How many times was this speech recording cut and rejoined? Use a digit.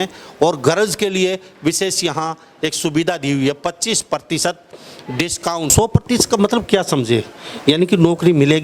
1